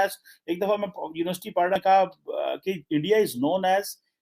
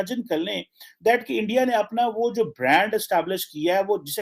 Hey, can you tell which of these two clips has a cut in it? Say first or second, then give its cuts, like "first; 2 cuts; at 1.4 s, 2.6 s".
first; 1 cut; at 1.8 s